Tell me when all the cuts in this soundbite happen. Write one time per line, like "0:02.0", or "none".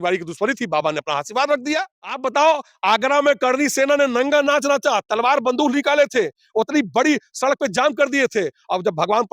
0:02.2